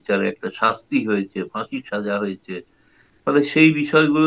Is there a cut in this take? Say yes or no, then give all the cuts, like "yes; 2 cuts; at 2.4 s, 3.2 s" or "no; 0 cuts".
no; 0 cuts